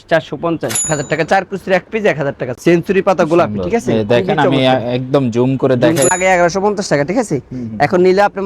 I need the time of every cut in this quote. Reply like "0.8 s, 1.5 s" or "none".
0.8 s, 2.5 s, 6.1 s